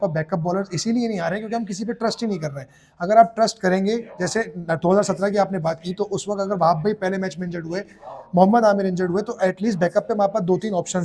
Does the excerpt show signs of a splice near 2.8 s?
no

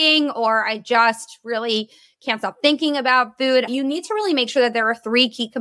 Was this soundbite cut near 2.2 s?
no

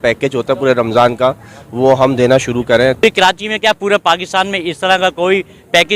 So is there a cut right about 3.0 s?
yes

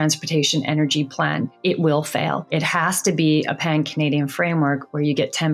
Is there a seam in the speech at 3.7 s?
no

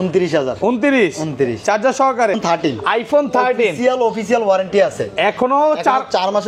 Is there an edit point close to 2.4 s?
yes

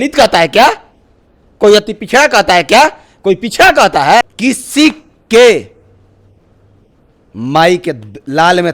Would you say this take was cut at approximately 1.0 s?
no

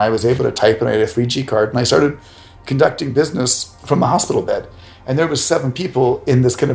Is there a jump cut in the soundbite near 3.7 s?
yes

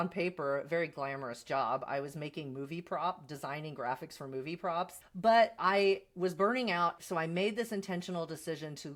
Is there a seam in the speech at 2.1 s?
no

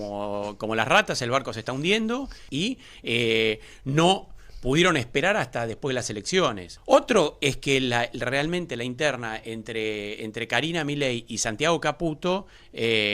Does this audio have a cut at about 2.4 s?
yes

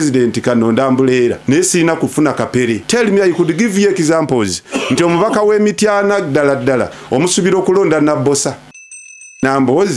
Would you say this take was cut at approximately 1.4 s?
yes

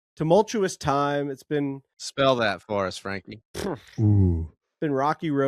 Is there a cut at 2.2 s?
yes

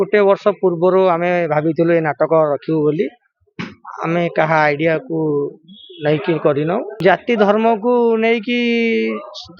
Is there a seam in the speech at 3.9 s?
no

